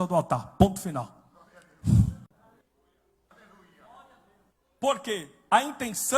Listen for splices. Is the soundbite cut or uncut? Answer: cut